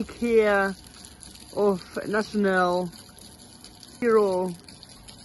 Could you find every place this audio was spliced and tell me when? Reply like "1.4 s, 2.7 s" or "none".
4.0 s

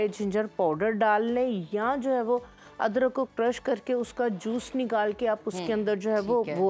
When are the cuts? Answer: none

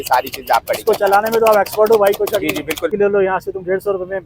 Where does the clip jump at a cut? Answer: 2.9 s

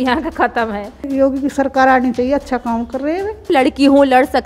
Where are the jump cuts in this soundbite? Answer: 1.0 s, 3.5 s

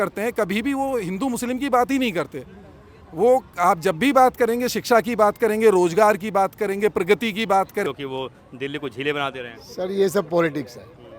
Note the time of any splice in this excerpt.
7.9 s

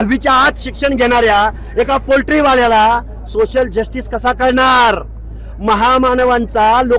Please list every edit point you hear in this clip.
none

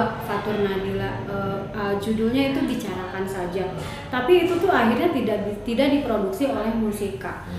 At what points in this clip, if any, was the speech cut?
none

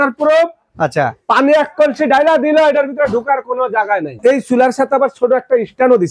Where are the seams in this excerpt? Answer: 3.9 s

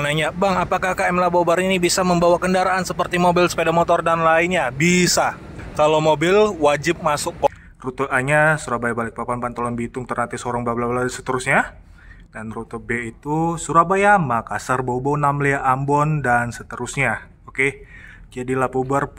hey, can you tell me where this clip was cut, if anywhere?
7.5 s

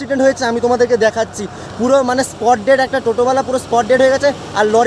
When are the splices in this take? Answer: none

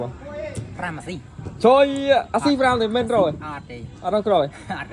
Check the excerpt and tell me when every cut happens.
none

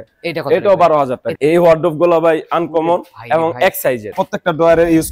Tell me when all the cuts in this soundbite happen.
1.3 s, 4.2 s

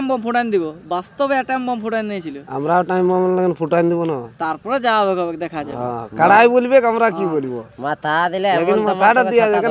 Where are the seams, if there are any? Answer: none

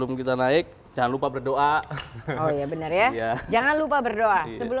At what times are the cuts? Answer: none

